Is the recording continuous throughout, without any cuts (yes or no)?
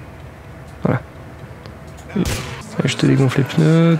no